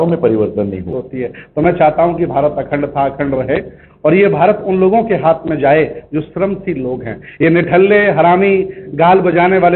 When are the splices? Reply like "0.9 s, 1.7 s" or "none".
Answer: 1.0 s